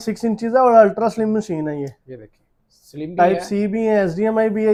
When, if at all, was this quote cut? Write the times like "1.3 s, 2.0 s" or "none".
none